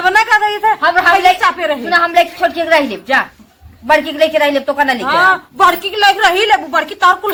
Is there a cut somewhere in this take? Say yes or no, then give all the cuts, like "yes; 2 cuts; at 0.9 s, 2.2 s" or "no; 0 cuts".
no; 0 cuts